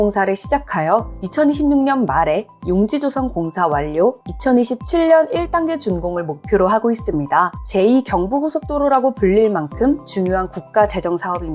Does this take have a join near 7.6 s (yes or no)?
yes